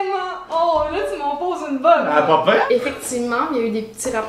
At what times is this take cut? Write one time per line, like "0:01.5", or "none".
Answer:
0:02.7

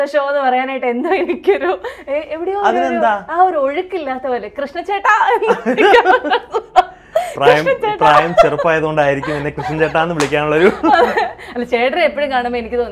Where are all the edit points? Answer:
none

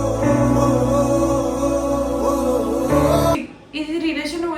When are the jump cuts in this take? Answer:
0:03.4

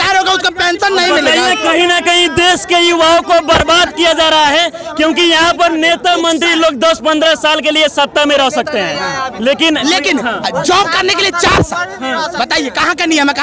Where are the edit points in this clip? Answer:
none

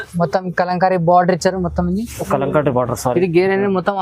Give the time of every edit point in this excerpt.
none

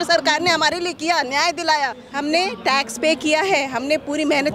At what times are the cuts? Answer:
0:02.1

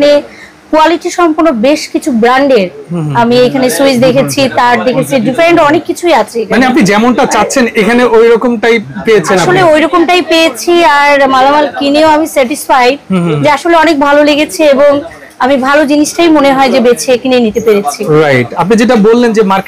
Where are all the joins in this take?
none

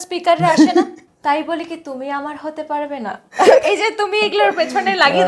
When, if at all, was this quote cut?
0:01.0

